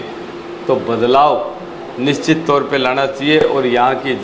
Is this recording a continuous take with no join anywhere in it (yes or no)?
yes